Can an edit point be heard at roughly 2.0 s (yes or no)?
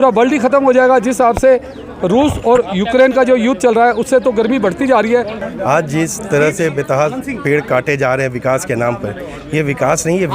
no